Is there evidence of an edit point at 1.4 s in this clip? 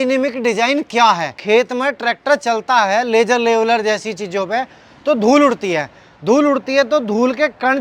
yes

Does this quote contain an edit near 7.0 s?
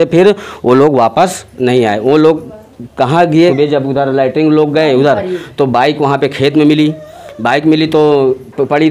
no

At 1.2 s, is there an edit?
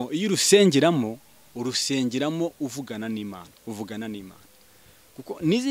no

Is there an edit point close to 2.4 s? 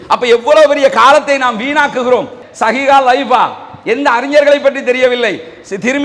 yes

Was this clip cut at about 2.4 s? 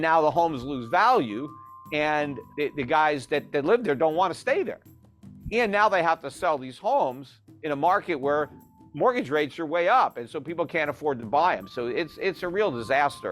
yes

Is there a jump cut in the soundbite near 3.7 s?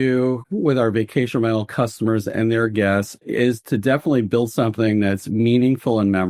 no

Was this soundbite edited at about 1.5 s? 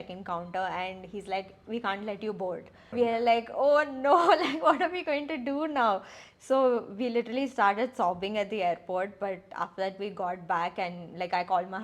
no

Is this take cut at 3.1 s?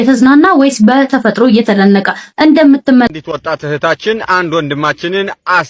yes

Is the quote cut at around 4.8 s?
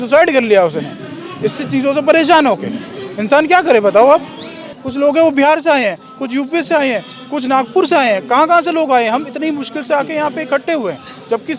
yes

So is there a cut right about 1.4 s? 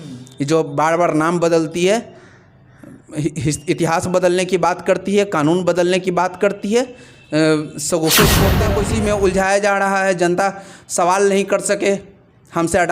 no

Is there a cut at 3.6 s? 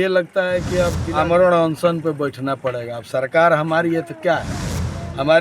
no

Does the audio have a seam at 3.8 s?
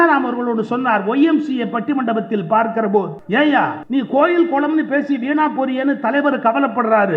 yes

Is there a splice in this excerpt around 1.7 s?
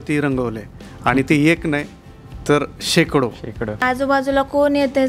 no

